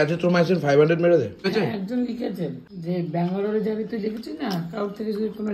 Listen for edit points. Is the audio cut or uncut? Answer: cut